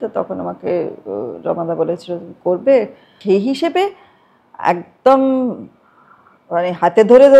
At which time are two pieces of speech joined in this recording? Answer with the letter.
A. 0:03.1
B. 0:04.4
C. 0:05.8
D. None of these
A